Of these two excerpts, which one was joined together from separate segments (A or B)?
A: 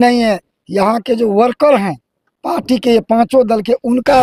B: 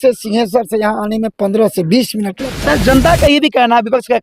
B